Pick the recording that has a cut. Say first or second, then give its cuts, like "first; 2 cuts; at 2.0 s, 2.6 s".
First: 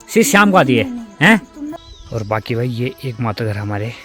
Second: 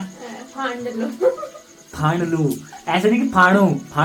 first; 1 cut; at 1.8 s